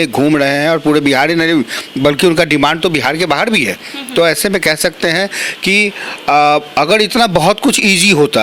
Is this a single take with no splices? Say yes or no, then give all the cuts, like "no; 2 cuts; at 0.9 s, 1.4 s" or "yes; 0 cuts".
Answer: yes; 0 cuts